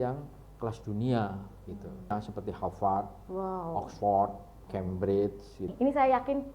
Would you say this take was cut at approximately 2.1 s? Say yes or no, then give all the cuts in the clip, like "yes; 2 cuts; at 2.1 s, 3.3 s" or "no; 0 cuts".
yes; 2 cuts; at 2.1 s, 5.7 s